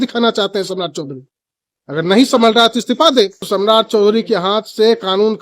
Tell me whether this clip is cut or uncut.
cut